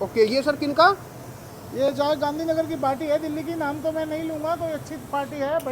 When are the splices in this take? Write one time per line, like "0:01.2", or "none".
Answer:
none